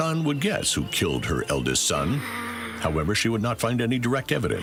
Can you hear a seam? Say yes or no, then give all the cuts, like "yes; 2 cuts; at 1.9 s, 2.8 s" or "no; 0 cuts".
no; 0 cuts